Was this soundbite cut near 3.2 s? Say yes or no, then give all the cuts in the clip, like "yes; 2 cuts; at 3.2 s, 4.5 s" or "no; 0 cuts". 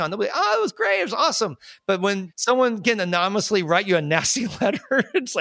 no; 1 cut; at 2.0 s